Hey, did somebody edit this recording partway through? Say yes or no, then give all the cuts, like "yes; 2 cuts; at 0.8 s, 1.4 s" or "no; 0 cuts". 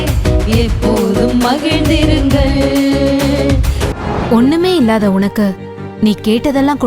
yes; 1 cut; at 3.8 s